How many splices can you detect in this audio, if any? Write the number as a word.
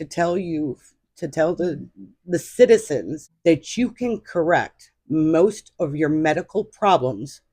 one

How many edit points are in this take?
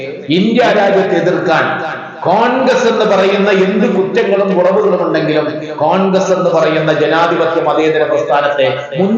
zero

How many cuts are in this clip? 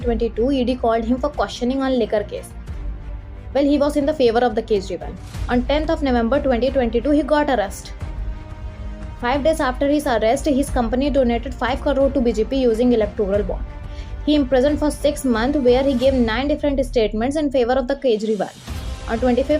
zero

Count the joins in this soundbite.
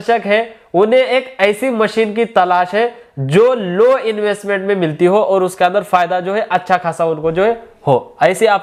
zero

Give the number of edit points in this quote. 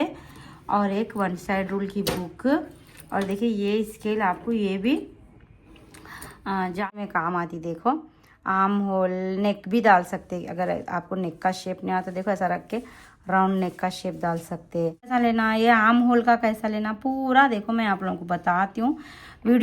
two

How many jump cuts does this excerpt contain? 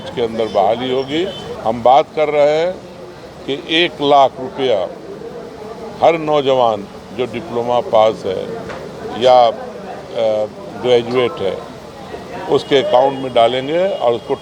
one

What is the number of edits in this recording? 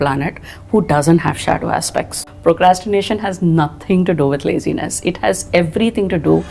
one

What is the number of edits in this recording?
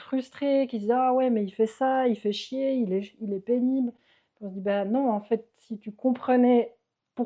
zero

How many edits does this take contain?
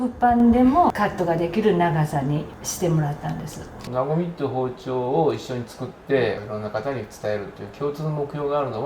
four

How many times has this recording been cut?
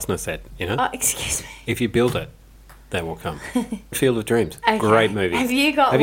one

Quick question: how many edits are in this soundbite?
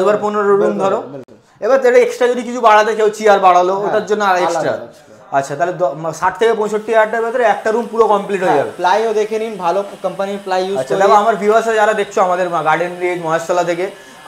zero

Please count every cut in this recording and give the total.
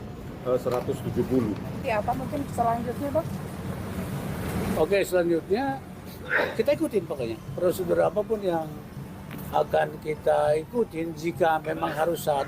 one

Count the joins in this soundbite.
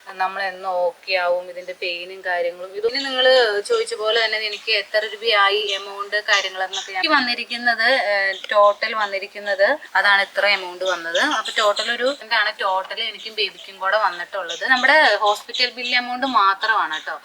five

